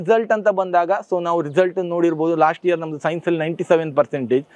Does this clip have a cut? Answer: no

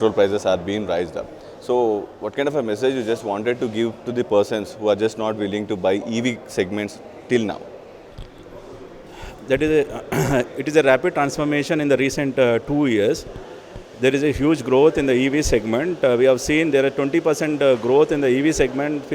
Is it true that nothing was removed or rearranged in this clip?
yes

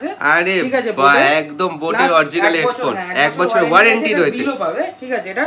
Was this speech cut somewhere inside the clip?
no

